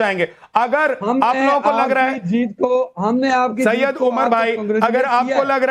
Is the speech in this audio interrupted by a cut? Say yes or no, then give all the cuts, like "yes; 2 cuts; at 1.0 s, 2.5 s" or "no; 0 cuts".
no; 0 cuts